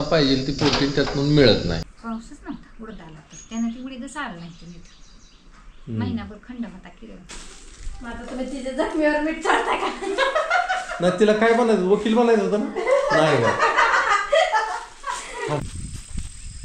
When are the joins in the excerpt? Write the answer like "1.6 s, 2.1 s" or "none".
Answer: 1.9 s, 7.3 s, 15.7 s